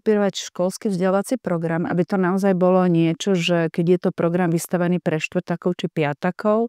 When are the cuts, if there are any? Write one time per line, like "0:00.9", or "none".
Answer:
none